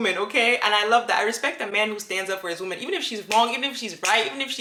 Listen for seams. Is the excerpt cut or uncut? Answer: uncut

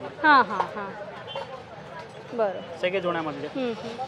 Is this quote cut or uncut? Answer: uncut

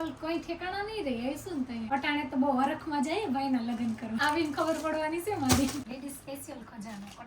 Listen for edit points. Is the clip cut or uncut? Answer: cut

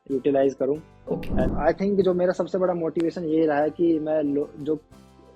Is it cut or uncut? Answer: cut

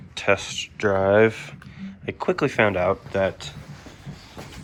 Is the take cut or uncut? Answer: uncut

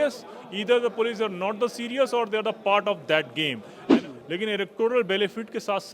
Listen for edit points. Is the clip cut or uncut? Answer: cut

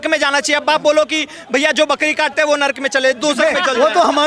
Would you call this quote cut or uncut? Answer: uncut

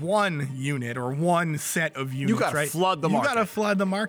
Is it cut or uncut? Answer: uncut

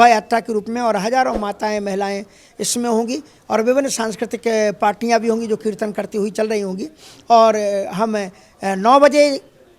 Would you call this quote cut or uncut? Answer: uncut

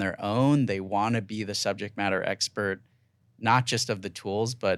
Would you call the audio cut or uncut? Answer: uncut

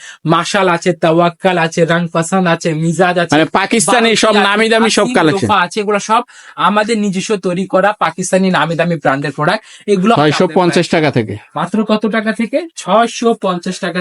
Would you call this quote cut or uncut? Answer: cut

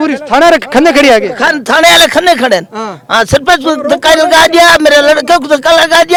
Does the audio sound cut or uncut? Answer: uncut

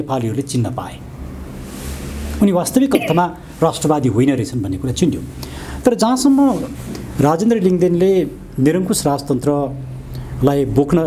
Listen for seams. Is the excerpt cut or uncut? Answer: uncut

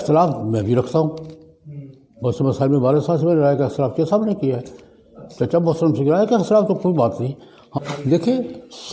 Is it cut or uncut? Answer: cut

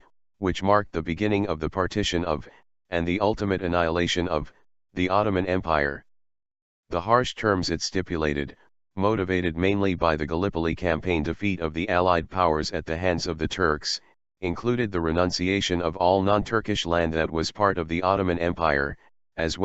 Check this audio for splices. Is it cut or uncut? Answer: uncut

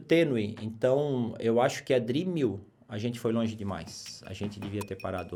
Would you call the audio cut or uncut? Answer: uncut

